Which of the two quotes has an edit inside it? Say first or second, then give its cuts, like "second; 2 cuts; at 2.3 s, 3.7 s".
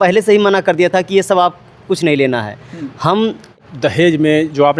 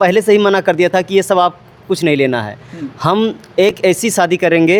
first; 1 cut; at 3.5 s